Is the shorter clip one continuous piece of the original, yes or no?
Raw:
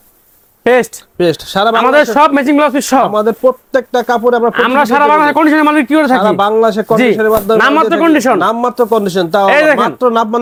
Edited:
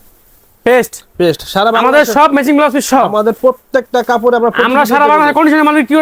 yes